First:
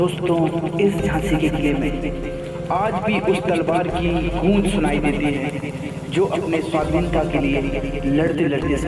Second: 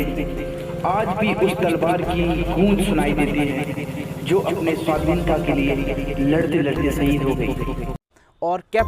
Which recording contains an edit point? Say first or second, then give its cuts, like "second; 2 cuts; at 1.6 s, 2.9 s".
second; 1 cut; at 7.9 s